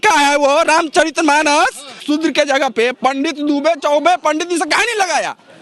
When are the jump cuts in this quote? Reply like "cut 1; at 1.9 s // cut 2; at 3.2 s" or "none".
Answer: cut 1; at 2.0 s